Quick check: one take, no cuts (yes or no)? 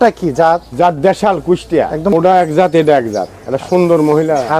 no